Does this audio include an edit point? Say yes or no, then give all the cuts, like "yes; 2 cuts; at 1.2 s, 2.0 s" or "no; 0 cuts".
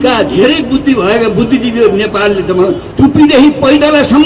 yes; 1 cut; at 2.9 s